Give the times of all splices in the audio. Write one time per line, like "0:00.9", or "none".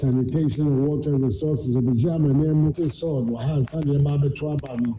0:02.7